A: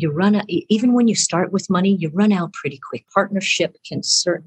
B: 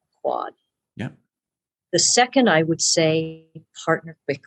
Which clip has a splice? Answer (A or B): A